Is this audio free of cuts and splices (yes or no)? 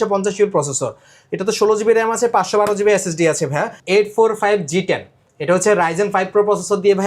no